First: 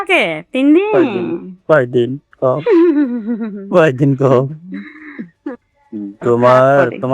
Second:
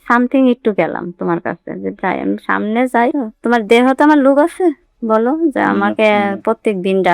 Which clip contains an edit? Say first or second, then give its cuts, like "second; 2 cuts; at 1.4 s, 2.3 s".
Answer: first; 1 cut; at 5.9 s